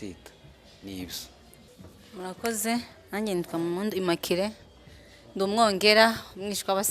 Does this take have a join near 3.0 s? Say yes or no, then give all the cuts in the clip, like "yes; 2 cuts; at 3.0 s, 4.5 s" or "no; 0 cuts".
no; 1 cut; at 1.6 s